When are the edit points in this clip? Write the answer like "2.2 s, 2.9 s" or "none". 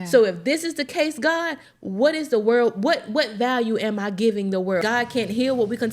4.8 s